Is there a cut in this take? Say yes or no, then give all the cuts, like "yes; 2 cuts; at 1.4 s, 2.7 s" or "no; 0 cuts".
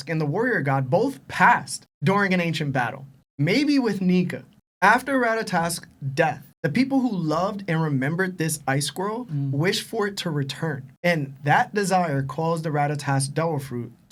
no; 0 cuts